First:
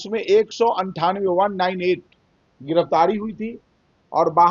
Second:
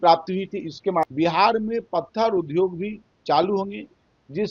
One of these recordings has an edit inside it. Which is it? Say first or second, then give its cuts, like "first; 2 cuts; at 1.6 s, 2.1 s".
second; 1 cut; at 1.1 s